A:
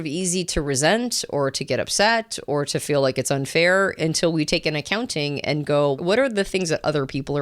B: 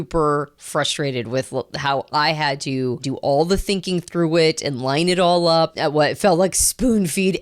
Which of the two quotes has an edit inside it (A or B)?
B